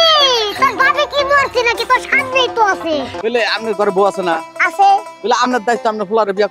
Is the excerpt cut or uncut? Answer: cut